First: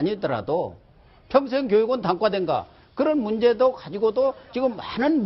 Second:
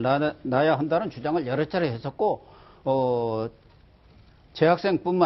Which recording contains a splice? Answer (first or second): second